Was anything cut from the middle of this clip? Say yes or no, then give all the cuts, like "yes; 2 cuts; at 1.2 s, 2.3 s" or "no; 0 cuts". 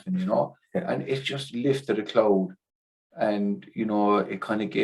no; 0 cuts